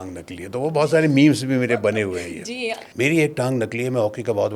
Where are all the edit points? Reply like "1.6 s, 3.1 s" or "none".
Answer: 2.8 s